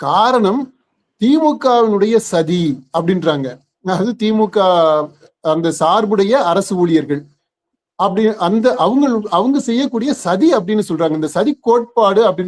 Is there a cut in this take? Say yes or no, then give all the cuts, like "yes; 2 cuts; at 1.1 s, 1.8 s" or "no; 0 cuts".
no; 0 cuts